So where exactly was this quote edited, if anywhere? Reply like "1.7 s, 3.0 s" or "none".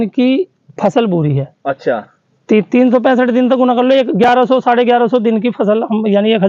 none